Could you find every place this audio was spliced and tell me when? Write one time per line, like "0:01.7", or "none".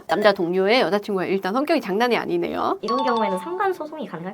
0:02.8